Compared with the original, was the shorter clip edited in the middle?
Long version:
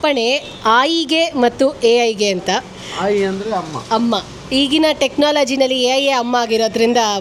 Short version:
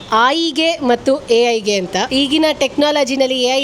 yes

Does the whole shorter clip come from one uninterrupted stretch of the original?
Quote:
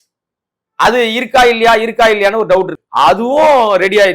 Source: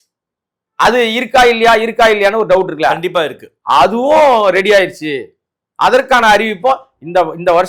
no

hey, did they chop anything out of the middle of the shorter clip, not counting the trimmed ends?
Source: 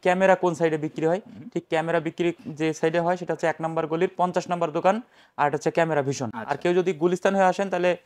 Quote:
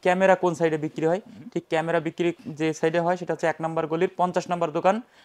no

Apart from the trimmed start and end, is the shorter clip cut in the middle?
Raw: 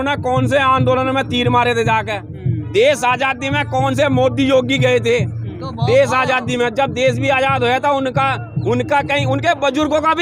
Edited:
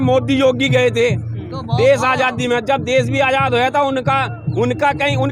no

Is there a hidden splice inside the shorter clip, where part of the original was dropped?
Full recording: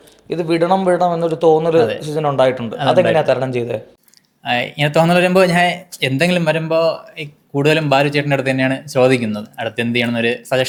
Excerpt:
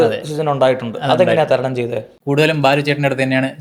yes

